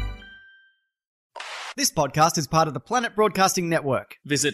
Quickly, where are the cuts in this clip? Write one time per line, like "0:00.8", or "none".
0:01.2

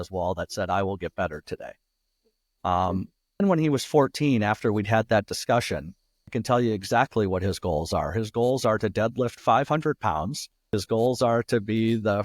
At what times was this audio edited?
0:03.4
0:06.4
0:10.8

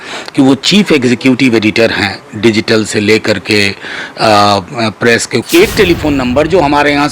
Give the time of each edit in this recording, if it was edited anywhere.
0:05.4

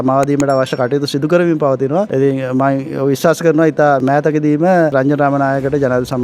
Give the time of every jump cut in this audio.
0:02.1
0:04.0
0:04.9

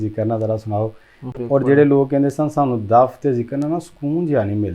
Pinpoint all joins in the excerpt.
0:01.3

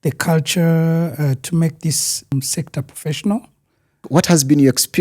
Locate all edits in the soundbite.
0:02.3
0:04.0

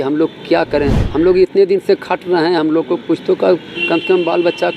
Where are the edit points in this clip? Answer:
0:01.0

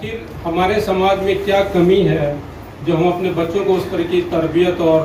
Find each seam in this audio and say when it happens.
none

